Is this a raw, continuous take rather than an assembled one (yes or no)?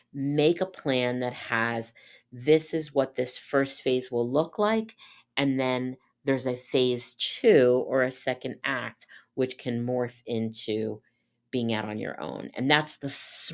yes